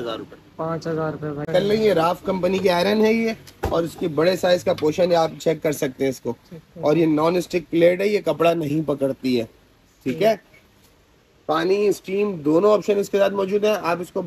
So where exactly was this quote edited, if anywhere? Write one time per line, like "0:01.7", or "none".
0:01.5